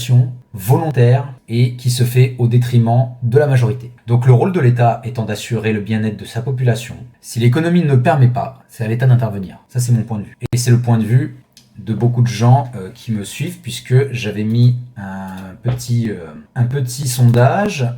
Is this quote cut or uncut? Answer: uncut